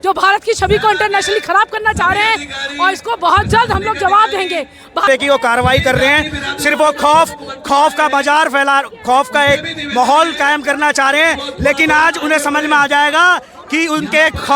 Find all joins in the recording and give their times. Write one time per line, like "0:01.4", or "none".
none